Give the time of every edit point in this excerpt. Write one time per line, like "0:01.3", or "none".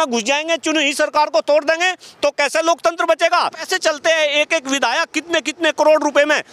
0:03.6